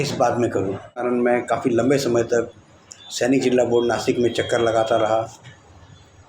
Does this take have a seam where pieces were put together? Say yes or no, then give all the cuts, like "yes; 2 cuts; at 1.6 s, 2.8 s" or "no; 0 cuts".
yes; 1 cut; at 1.0 s